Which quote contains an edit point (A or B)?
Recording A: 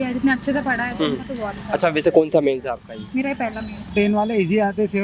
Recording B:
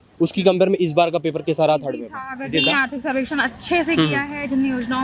A